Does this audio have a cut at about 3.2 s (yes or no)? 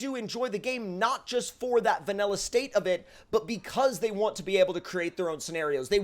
no